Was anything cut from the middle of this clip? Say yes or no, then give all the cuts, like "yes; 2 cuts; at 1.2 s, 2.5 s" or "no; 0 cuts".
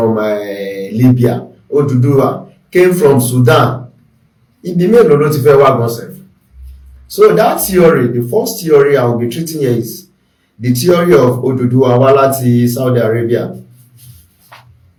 no; 0 cuts